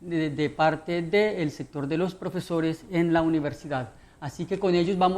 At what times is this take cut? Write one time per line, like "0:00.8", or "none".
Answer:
0:03.5